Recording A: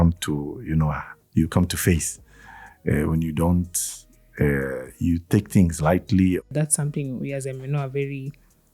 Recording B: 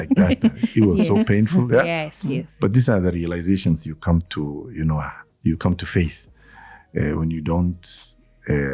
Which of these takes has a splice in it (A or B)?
A